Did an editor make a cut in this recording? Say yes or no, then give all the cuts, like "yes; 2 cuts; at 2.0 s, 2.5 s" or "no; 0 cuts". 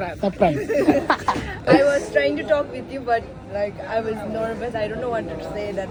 no; 0 cuts